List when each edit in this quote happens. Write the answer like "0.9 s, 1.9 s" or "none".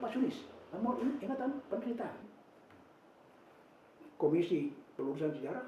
2.4 s